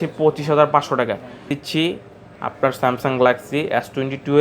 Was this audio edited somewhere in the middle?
yes; 1 cut; at 1.6 s

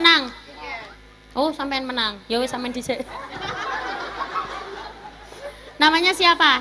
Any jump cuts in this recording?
no; 0 cuts

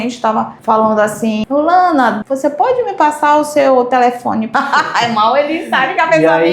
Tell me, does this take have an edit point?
yes; 3 cuts; at 1.4 s, 2.3 s, 4.5 s

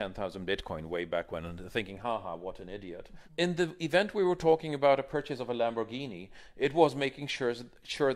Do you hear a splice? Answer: yes; 1 cut; at 3.1 s

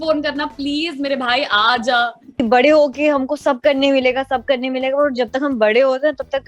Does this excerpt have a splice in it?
yes; 1 cut; at 2.3 s

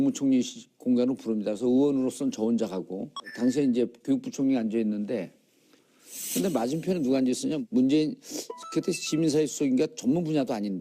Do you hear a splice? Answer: yes; 1 cut; at 1.4 s

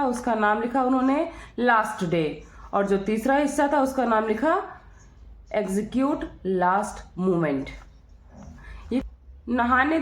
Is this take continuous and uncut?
no; 1 cut; at 9.0 s

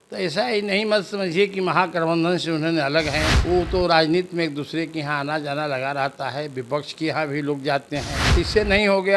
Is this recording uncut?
no; 2 cuts; at 3.3 s, 8.2 s

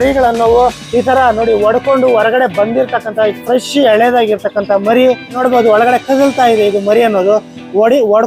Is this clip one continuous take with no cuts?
no; 1 cut; at 5.4 s

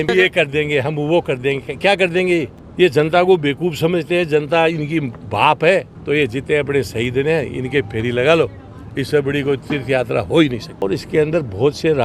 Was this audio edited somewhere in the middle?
yes; 3 cuts; at 2.6 s, 5.9 s, 10.7 s

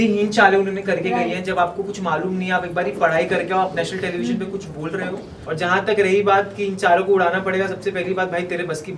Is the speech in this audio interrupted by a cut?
yes; 1 cut; at 5.3 s

